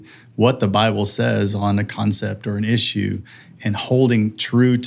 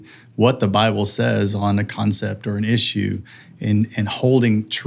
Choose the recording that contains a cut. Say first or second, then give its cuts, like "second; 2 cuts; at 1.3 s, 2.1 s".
first; 1 cut; at 3.6 s